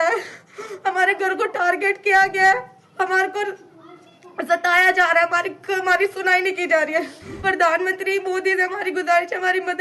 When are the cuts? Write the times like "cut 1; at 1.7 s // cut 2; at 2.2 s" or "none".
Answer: cut 1; at 7.2 s